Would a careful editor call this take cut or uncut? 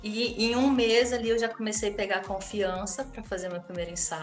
uncut